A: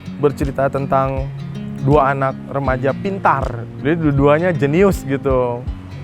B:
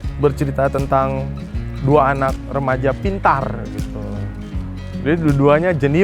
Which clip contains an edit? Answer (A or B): A